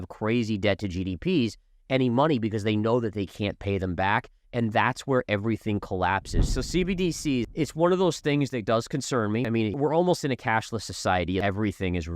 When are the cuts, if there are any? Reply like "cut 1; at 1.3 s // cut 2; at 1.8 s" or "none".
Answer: cut 1; at 6.5 s // cut 2; at 7.5 s // cut 3; at 9.7 s // cut 4; at 11.4 s